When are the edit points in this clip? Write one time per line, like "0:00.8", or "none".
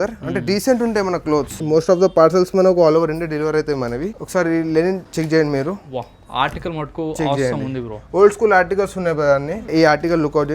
0:01.6
0:04.2
0:05.1
0:09.7